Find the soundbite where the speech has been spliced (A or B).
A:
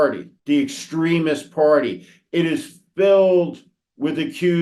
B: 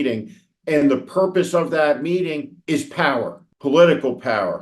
B